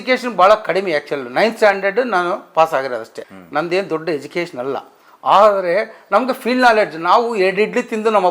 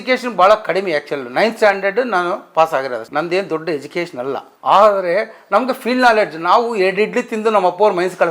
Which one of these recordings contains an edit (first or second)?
second